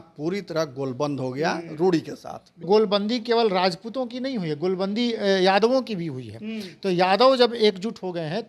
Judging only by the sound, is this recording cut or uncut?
cut